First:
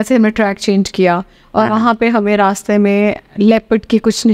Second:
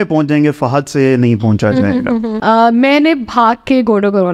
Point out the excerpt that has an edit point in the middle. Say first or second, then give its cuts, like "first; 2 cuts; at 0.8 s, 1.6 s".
second; 1 cut; at 2.3 s